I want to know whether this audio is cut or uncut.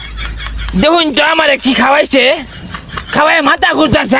uncut